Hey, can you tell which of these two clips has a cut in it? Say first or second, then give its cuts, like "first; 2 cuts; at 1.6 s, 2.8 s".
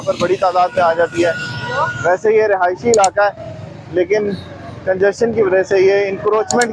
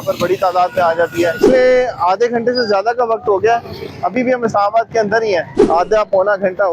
second; 2 cuts; at 1.4 s, 5.5 s